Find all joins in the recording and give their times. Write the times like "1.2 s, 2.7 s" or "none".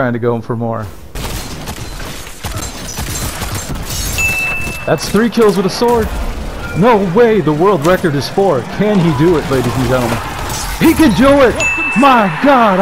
1.1 s